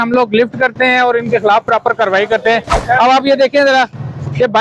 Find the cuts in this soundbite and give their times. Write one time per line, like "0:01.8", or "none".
none